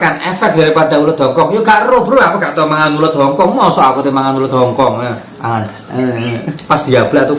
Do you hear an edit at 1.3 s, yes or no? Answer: no